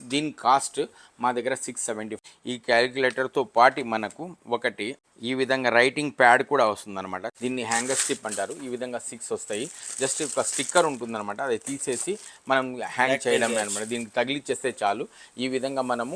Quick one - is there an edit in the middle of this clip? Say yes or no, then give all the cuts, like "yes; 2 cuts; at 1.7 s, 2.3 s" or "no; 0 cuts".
yes; 3 cuts; at 2.1 s, 5.0 s, 7.3 s